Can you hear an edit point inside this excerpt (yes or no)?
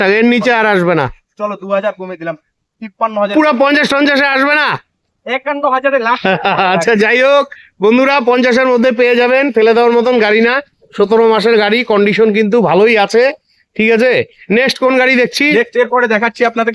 no